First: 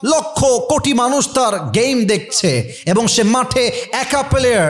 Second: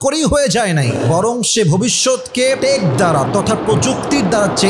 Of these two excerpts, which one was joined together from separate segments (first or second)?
second